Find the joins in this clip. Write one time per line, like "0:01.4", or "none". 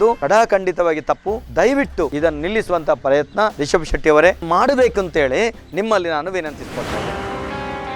0:05.6
0:07.0